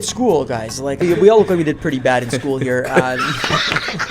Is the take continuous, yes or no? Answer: no